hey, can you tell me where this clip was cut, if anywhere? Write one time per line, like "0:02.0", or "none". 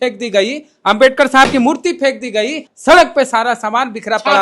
0:02.7